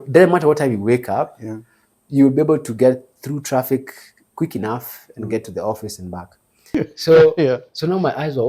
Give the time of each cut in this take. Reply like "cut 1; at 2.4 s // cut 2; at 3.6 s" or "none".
cut 1; at 6.8 s